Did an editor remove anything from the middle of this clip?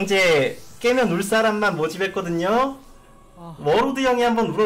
no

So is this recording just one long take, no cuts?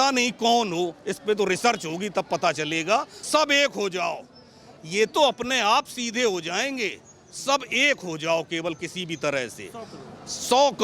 no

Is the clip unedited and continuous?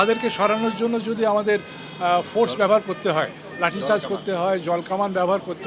yes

